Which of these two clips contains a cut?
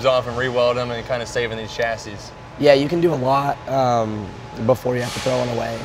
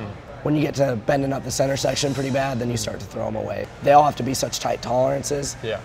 second; 1 cut; at 3.7 s

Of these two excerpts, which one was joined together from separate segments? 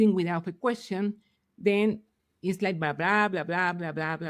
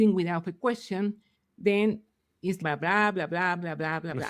second; 1 cut; at 2.6 s

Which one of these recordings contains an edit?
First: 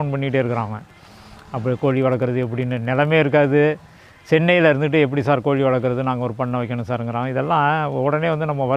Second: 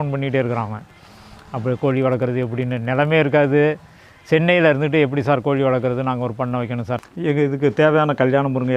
second; 1 cut; at 7.0 s

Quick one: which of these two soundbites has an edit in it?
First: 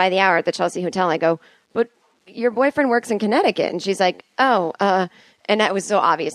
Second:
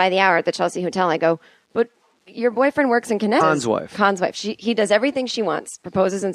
first; 1 cut; at 3.4 s

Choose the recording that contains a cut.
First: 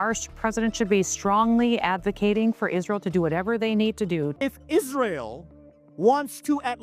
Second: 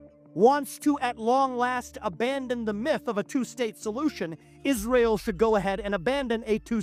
first; 1 cut; at 4.3 s

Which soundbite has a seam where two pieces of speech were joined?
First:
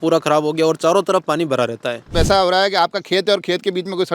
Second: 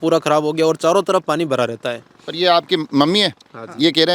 first; 1 cut; at 2.1 s

